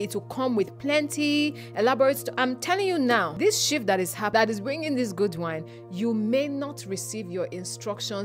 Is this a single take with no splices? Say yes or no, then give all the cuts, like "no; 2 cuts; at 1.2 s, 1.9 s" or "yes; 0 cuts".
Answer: no; 3 cuts; at 2.3 s, 3.3 s, 4.3 s